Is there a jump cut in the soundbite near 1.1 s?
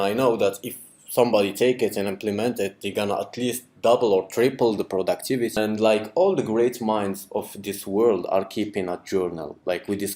no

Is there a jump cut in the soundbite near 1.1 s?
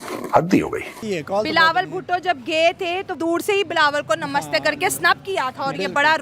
yes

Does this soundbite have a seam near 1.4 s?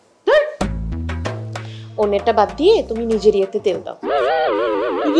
yes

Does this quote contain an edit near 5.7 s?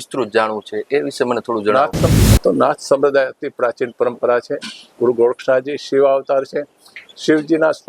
no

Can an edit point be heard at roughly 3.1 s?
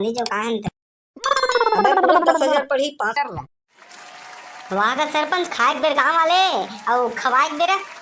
yes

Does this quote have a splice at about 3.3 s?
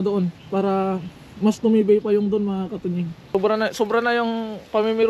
yes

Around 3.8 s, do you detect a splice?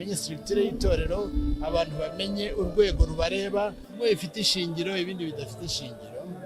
yes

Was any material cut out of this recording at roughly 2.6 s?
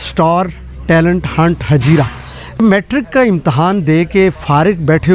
yes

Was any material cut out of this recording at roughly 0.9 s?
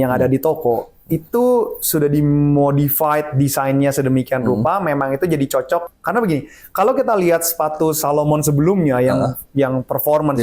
no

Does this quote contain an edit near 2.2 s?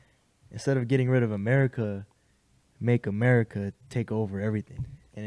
no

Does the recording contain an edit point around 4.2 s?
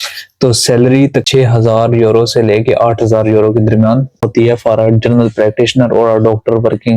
yes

